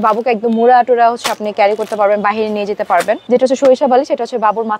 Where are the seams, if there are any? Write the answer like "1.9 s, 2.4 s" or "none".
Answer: 3.2 s